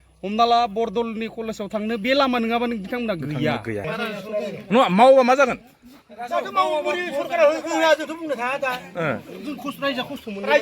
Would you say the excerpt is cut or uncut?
cut